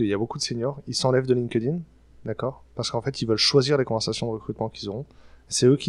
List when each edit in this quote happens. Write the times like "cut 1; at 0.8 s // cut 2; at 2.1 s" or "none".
none